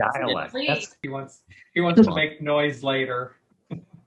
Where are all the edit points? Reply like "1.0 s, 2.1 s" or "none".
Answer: 0.9 s